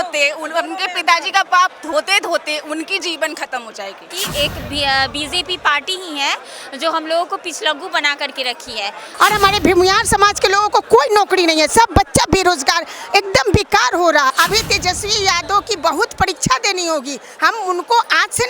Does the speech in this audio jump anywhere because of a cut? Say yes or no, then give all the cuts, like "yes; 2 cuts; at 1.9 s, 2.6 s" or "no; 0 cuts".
yes; 3 cuts; at 4.2 s, 9.1 s, 14.3 s